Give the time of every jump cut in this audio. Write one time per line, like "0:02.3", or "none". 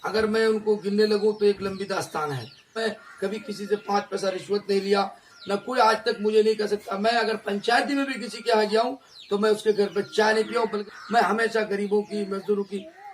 0:02.8
0:10.8